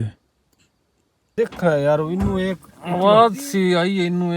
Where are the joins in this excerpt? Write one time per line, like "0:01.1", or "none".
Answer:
0:01.2